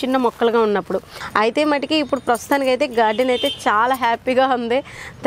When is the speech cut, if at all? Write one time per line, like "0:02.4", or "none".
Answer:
0:01.2